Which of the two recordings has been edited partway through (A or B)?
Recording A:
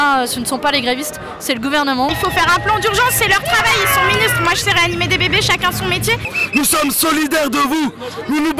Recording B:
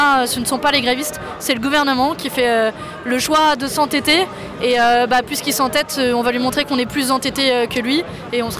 A